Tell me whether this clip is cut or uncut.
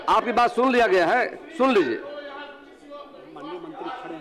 uncut